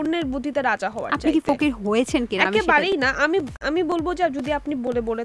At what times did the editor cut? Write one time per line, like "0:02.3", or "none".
none